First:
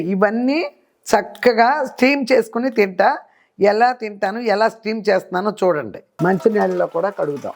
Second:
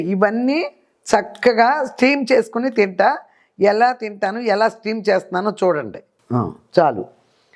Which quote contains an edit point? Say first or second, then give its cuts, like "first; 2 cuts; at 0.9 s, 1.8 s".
first; 1 cut; at 6.1 s